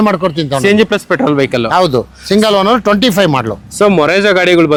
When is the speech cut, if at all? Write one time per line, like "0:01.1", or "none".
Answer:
none